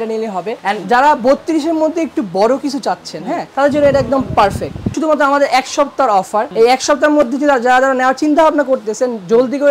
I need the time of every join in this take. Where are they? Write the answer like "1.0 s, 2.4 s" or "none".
4.9 s, 6.5 s